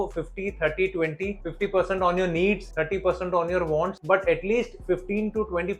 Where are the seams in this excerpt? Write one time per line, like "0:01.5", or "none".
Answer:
none